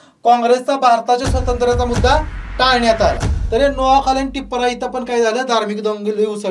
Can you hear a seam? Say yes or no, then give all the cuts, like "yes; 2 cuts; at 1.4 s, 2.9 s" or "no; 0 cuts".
yes; 1 cut; at 3.3 s